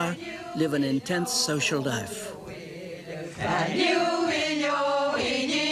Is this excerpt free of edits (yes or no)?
yes